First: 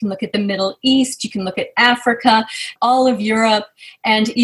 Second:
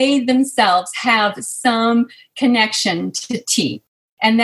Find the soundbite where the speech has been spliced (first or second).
first